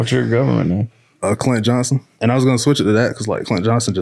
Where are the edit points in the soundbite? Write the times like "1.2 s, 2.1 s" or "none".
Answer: 2.0 s